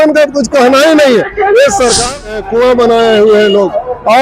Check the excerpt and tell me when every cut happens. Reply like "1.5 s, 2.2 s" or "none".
2.3 s